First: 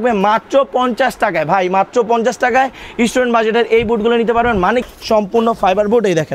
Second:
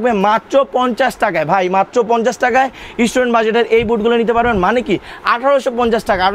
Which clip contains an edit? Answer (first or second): first